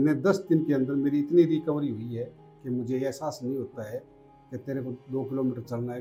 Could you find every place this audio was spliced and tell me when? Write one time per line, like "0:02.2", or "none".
none

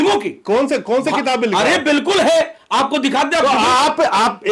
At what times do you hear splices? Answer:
none

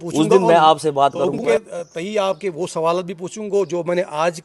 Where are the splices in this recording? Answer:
0:01.4

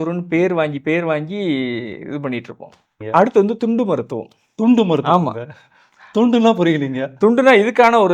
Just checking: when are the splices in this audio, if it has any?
0:02.9

